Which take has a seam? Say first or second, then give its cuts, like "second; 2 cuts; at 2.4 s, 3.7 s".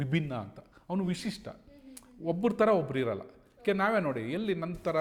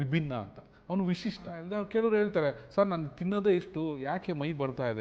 second; 1 cut; at 1.6 s